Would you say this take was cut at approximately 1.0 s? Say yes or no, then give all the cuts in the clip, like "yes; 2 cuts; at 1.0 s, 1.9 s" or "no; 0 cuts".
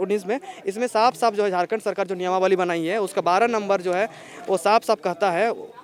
no; 0 cuts